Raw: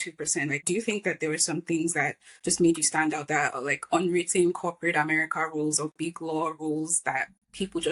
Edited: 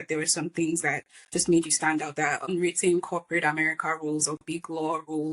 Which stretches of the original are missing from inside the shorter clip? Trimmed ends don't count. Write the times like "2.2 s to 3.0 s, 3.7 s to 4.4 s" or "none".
3.6 s to 4.0 s